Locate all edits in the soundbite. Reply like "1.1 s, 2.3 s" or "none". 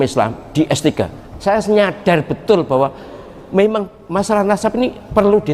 1.2 s, 4.0 s